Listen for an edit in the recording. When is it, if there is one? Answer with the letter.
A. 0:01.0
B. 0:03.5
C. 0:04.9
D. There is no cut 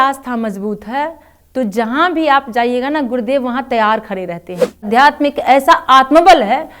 C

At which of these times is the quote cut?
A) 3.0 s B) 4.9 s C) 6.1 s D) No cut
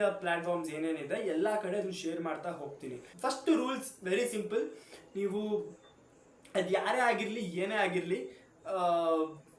A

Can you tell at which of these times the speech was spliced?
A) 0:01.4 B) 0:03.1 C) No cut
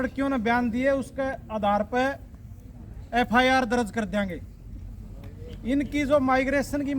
C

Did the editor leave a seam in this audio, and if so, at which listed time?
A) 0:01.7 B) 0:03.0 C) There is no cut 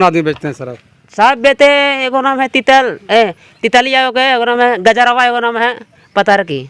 C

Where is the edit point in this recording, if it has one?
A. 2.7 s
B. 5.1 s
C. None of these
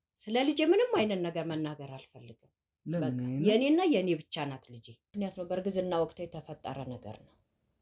B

